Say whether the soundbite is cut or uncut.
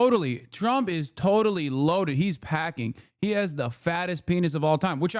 uncut